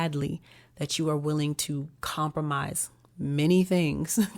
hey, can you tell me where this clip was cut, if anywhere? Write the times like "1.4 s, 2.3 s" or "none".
none